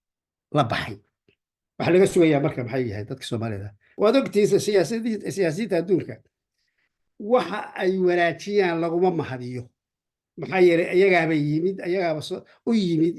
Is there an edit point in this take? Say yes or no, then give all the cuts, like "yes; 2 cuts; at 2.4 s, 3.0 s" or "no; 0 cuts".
yes; 1 cut; at 3.8 s